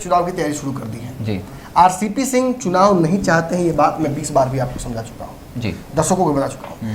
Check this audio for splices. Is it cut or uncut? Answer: uncut